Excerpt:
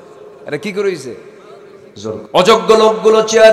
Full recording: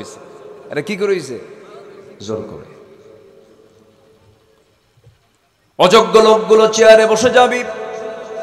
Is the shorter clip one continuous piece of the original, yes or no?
no